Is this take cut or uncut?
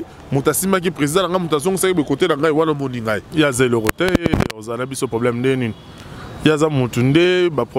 cut